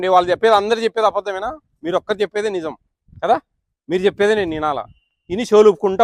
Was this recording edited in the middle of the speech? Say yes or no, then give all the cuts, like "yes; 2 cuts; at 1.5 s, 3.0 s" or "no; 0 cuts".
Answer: no; 0 cuts